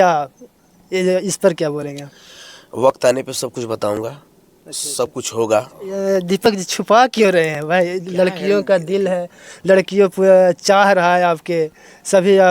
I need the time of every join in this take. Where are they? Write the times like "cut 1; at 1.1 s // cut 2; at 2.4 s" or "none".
cut 1; at 5.9 s